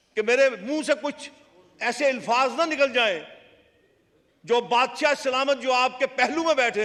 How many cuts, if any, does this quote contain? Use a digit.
0